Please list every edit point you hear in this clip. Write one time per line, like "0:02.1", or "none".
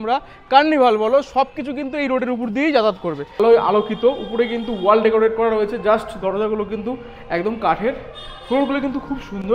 0:03.4